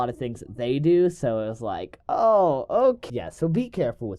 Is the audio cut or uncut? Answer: cut